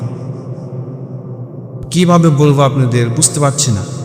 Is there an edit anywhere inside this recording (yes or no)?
yes